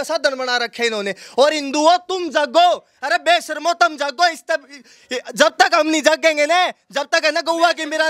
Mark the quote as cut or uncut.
uncut